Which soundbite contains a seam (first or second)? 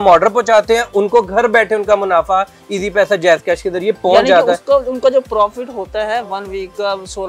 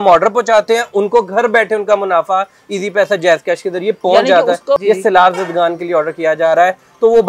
second